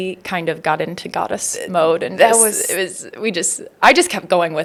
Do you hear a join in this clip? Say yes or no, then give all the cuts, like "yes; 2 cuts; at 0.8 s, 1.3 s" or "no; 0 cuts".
no; 0 cuts